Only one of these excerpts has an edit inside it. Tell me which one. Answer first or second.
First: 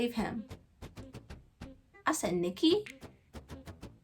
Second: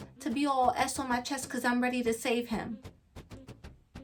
first